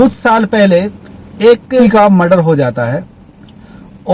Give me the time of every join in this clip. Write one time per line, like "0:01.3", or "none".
0:01.8